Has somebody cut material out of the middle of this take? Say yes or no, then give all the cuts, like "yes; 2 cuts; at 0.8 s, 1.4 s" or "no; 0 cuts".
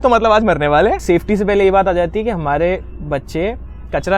yes; 1 cut; at 1.0 s